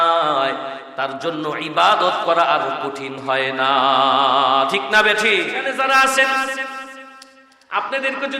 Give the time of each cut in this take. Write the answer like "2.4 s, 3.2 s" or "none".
5.6 s